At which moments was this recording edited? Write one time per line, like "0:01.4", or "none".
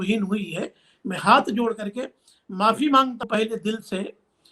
0:03.3